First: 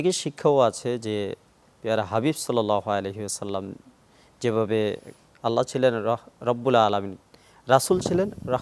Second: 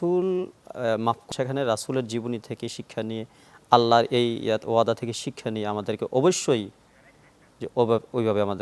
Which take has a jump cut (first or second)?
second